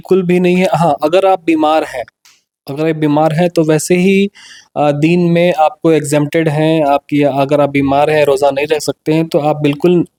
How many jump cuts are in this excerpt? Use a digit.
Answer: 0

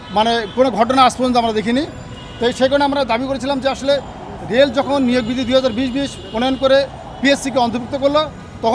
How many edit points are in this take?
0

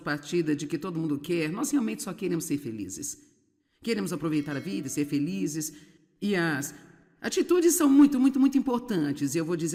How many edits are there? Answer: 0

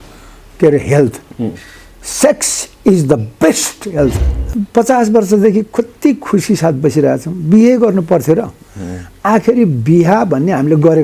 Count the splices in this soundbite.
1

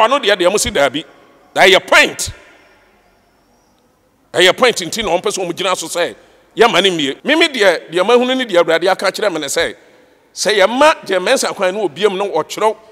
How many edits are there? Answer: 1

